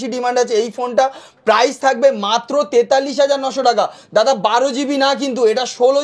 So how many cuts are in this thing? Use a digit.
0